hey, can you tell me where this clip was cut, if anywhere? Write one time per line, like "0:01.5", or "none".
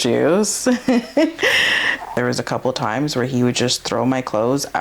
0:02.2